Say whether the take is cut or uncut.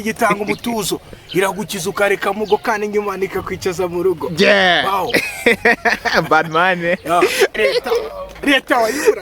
cut